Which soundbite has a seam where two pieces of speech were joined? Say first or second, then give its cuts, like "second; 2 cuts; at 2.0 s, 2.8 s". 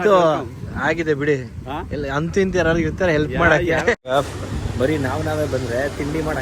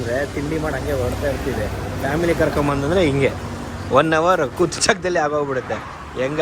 first; 1 cut; at 4.1 s